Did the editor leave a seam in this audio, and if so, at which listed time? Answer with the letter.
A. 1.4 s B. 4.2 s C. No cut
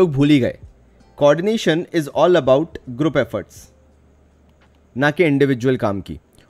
C